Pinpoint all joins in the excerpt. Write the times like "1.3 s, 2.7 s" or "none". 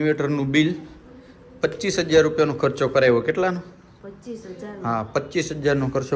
none